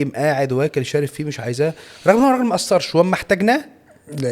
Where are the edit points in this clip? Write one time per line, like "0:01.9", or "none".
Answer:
none